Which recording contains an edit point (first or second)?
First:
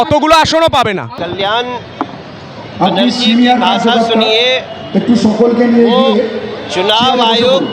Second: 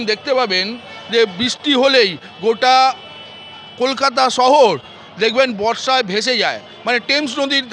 first